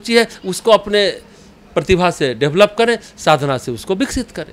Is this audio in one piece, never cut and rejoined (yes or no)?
yes